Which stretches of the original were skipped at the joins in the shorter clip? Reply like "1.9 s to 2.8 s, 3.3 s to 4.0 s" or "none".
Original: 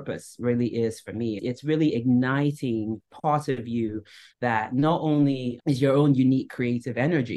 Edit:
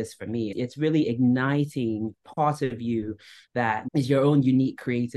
4.7 s to 5.6 s